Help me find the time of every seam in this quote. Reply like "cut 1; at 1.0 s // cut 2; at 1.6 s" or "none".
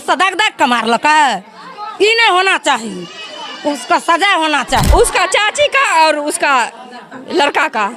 cut 1; at 4.9 s